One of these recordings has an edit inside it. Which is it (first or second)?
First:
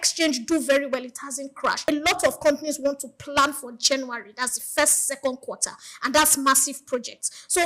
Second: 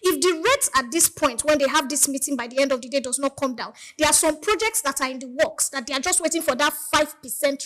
first